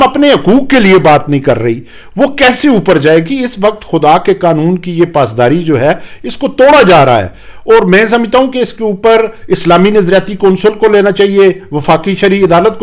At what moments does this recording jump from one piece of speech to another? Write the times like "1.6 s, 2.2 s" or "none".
none